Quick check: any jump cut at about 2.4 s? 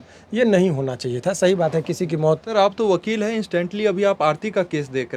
yes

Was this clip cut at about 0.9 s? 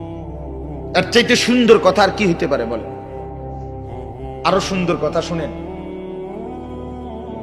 yes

